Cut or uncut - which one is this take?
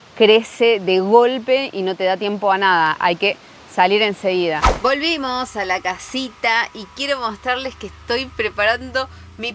cut